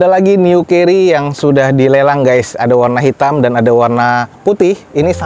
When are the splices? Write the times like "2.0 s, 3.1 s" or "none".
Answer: none